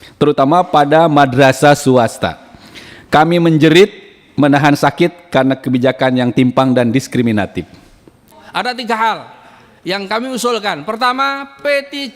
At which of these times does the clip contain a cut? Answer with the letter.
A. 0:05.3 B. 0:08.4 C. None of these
B